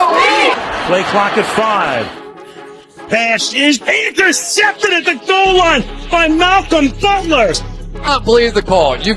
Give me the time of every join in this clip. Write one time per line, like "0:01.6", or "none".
none